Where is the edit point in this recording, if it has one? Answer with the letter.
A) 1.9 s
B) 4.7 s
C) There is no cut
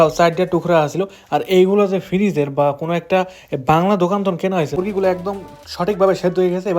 B